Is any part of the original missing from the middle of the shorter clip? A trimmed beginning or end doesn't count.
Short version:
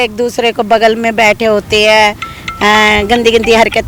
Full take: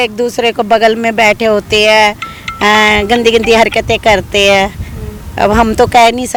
no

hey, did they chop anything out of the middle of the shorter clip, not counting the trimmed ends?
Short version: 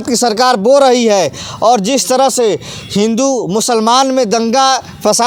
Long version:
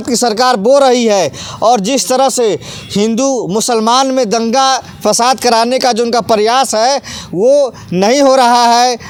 no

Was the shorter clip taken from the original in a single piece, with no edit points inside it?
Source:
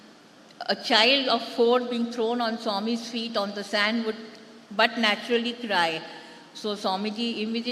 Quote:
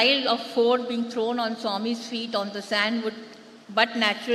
yes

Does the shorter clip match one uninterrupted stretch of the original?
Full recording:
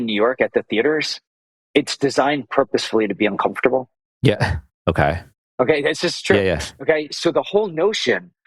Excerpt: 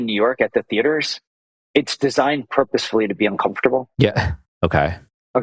no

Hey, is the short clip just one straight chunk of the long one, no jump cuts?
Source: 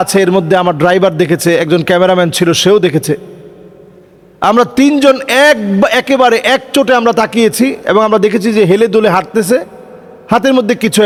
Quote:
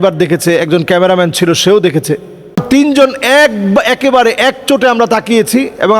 no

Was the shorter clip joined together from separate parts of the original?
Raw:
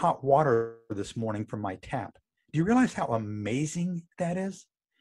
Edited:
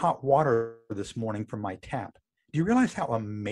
no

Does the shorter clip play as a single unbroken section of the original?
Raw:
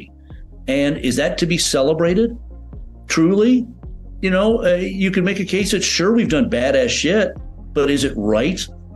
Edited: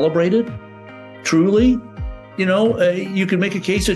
yes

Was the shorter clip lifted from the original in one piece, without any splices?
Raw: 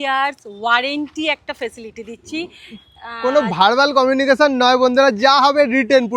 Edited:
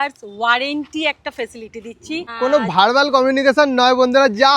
no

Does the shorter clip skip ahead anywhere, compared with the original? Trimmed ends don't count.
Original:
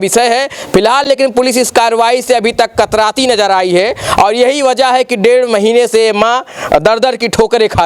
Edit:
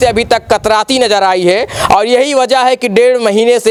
no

